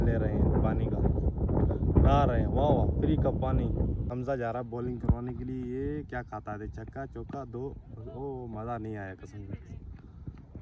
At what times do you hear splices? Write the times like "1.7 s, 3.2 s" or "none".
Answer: none